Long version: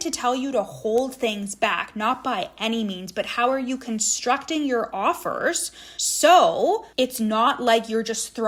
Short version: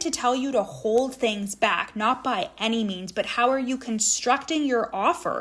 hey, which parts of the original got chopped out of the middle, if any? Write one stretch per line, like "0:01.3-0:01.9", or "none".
none